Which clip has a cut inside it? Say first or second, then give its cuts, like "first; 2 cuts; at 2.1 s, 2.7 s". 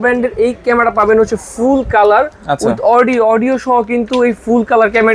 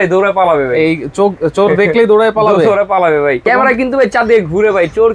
second; 1 cut; at 3.4 s